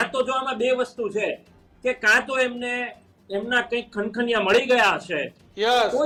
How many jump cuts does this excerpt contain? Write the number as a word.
zero